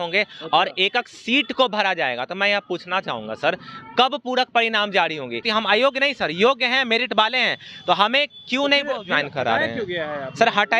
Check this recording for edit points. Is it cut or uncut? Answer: cut